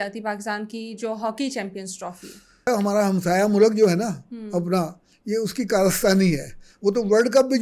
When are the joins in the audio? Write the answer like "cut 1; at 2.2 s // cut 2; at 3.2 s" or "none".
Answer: cut 1; at 2.7 s